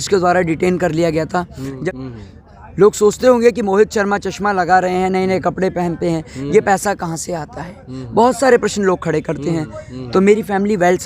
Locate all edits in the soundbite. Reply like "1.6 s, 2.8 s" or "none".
1.8 s